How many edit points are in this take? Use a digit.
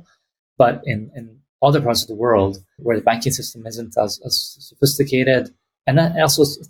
1